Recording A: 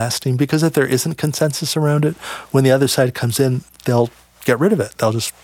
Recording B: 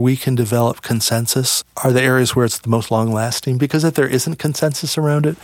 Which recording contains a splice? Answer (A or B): A